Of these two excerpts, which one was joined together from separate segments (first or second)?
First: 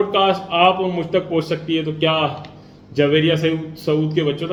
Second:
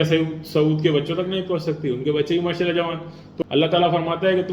second